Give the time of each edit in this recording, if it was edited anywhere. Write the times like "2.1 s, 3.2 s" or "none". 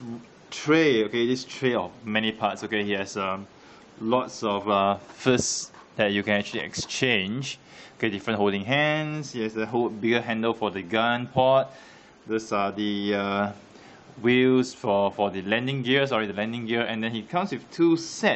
14.6 s